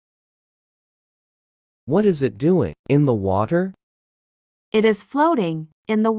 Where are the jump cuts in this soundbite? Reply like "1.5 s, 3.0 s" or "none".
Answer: none